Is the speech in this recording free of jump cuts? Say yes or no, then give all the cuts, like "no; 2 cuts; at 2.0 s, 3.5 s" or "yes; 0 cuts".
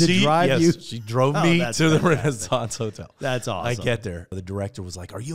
no; 1 cut; at 4.4 s